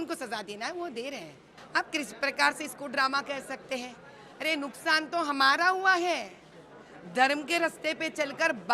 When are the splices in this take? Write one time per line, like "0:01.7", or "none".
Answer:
0:01.5